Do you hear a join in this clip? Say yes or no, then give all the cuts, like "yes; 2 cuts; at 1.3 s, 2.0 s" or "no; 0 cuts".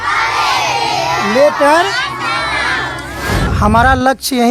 yes; 1 cut; at 3.5 s